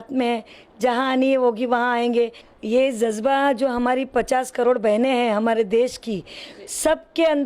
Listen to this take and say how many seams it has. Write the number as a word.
one